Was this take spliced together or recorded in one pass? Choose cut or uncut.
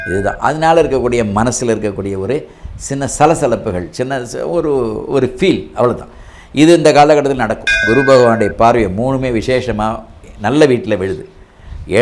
cut